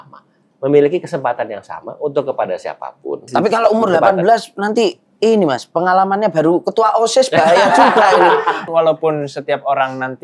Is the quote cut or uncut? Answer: cut